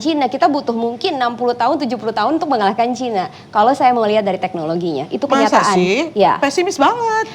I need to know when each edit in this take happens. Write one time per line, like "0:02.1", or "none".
none